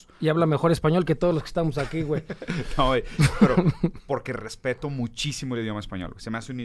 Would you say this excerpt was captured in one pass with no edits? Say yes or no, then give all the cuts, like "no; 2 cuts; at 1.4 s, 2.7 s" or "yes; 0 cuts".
yes; 0 cuts